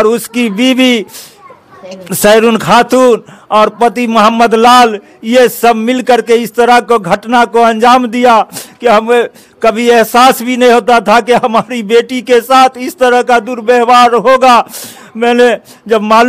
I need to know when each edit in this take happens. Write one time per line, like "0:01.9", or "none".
none